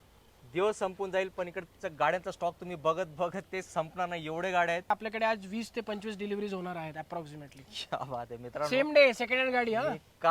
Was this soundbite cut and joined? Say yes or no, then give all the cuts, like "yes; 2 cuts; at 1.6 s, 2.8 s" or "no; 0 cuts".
yes; 1 cut; at 4.9 s